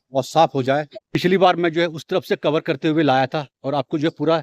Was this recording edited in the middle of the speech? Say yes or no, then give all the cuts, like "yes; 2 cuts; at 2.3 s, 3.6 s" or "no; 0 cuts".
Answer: yes; 1 cut; at 1.0 s